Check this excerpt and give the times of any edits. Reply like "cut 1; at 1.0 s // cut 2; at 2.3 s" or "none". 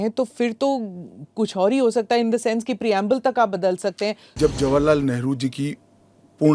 cut 1; at 4.2 s